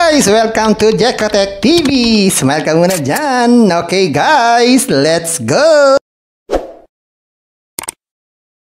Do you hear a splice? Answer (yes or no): no